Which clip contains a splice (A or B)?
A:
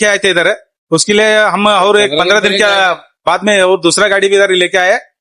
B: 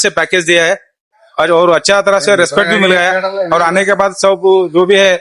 B